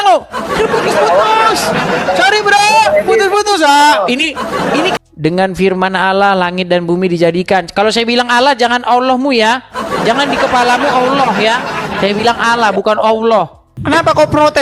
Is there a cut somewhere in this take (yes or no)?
yes